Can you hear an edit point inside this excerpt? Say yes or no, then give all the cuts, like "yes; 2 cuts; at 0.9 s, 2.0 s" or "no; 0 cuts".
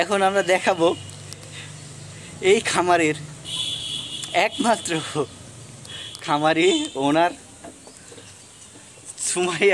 no; 0 cuts